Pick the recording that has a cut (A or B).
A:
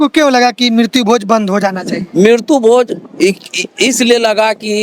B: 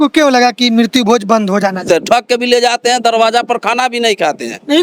B